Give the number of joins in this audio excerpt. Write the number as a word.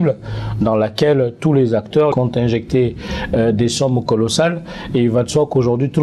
one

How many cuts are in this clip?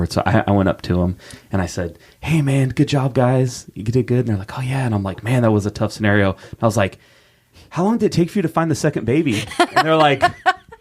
one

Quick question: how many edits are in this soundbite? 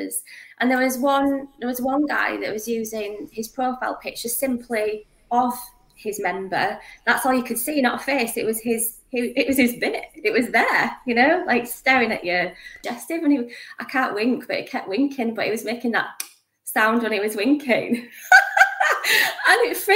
one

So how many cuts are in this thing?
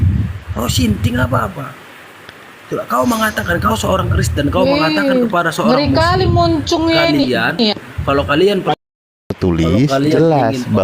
one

